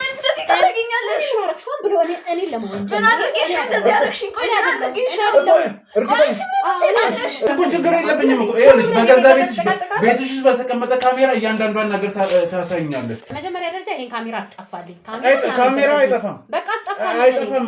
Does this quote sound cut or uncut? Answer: cut